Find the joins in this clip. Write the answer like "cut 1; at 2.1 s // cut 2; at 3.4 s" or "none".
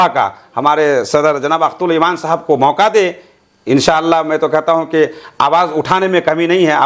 none